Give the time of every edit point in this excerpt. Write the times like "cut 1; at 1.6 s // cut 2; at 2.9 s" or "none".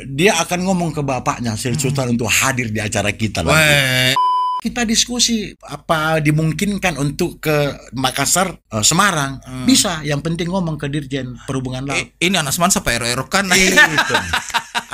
cut 1; at 4.2 s // cut 2; at 5.6 s // cut 3; at 8.6 s